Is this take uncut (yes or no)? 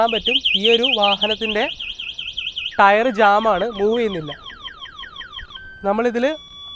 yes